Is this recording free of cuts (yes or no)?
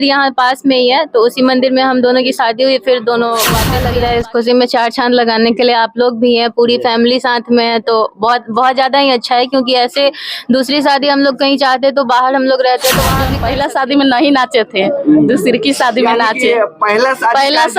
no